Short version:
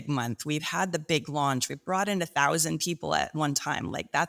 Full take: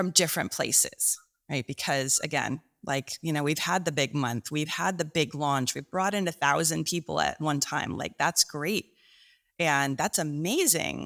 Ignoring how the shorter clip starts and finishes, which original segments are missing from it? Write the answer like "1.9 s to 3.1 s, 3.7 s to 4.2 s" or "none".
none